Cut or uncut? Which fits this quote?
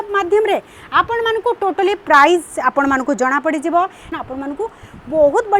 cut